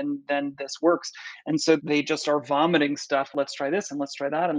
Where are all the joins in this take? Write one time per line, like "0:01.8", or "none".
0:01.8
0:03.3